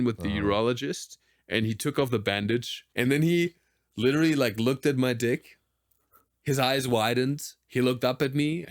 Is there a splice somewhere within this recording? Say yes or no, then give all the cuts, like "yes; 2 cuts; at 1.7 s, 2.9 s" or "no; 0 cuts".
yes; 1 cut; at 2.8 s